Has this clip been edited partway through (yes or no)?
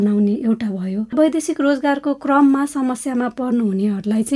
yes